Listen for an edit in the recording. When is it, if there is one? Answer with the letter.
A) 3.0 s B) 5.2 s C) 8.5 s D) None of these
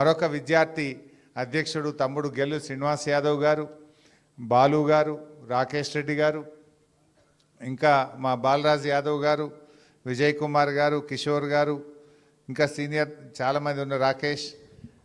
A